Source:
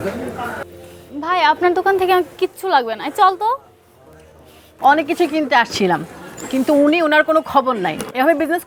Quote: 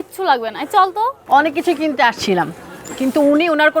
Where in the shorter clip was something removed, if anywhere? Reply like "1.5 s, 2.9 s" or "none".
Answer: 1.2 s